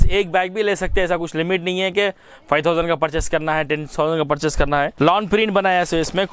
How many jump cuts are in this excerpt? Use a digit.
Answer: 1